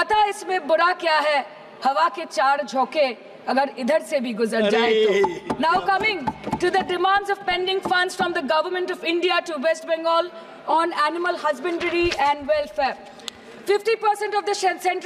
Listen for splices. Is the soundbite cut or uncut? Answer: uncut